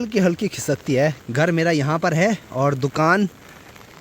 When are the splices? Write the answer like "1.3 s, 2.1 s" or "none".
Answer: 1.2 s